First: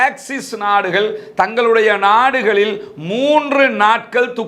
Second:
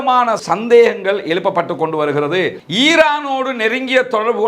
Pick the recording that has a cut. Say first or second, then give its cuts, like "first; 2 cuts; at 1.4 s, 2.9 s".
second; 1 cut; at 2.6 s